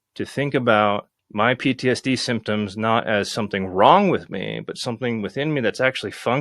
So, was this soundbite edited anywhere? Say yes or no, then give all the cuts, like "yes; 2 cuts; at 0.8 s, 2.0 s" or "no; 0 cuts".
yes; 1 cut; at 1.2 s